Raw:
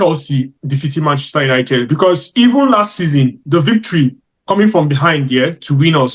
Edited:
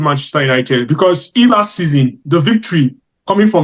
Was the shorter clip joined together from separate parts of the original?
yes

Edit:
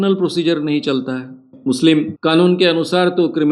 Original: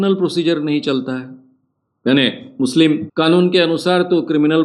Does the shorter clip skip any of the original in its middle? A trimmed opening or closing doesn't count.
yes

